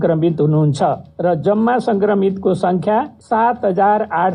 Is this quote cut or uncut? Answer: cut